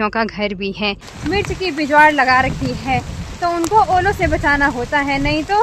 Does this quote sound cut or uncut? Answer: cut